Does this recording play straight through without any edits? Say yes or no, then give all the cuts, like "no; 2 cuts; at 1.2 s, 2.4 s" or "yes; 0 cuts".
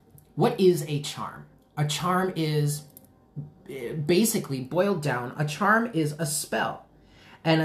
yes; 0 cuts